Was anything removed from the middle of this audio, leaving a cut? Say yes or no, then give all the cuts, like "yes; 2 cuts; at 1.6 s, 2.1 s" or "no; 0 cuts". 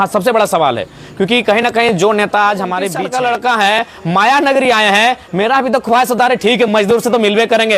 yes; 1 cut; at 2.9 s